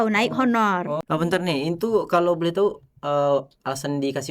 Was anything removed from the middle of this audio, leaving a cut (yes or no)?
yes